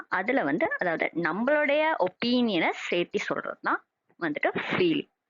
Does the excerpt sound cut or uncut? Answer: cut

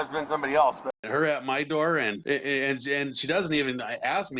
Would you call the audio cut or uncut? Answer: cut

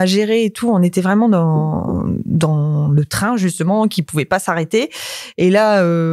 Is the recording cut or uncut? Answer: uncut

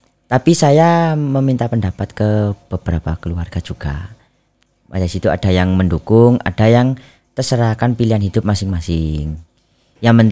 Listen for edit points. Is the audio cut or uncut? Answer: uncut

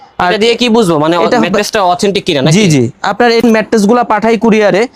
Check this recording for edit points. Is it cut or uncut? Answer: cut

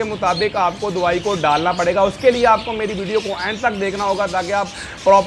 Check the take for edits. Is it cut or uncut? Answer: uncut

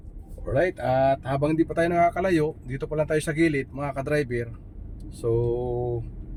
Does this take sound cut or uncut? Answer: uncut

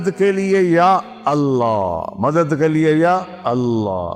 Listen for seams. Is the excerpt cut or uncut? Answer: uncut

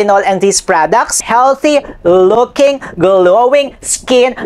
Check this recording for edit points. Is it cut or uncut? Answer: cut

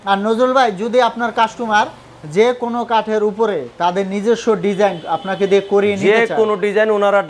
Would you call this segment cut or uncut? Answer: uncut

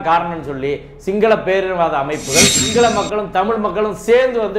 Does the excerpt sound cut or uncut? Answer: cut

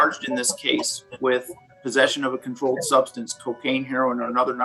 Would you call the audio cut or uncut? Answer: uncut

